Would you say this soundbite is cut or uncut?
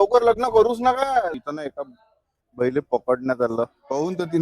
cut